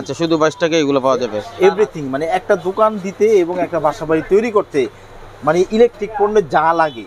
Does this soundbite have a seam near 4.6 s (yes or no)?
no